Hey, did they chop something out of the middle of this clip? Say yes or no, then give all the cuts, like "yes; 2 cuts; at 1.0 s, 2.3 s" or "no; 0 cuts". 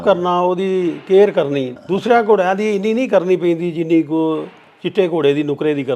yes; 1 cut; at 1.8 s